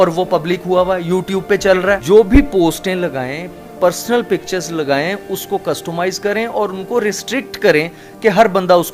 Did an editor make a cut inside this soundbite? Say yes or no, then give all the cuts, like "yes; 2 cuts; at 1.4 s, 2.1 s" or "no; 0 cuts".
no; 0 cuts